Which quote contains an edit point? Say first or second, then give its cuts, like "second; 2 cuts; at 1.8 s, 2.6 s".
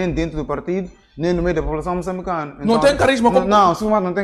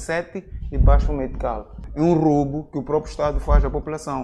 second; 1 cut; at 1.8 s